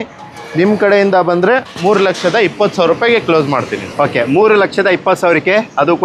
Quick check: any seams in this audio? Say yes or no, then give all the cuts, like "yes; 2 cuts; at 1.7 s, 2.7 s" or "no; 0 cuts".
no; 0 cuts